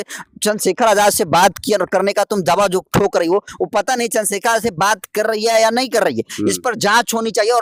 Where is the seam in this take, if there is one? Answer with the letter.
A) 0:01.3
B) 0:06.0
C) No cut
C